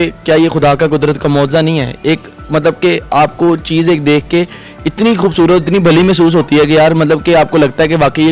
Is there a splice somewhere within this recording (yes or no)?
no